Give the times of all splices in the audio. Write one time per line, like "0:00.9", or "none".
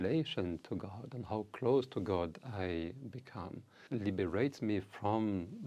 0:03.7